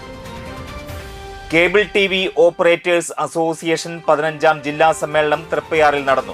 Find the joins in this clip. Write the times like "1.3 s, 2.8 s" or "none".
1.1 s

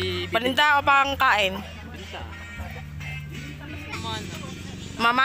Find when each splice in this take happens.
3.9 s

